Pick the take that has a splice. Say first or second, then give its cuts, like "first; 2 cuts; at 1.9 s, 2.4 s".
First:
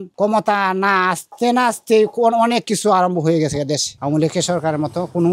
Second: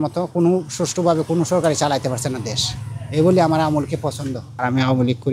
first; 1 cut; at 3.9 s